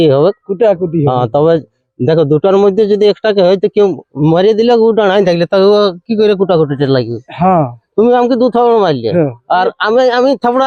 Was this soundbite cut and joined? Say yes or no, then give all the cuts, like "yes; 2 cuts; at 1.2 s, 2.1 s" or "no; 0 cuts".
no; 0 cuts